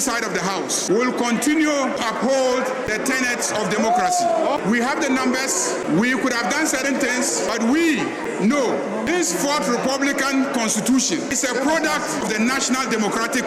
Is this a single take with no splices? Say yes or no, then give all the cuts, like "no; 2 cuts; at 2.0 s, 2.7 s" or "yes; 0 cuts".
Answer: no; 9 cuts; at 0.8 s, 2.0 s, 2.9 s, 4.4 s, 5.8 s, 7.5 s, 9.1 s, 11.3 s, 12.2 s